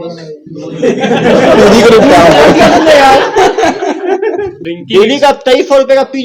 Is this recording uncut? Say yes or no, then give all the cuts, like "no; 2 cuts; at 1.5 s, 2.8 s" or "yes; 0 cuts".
no; 1 cut; at 4.6 s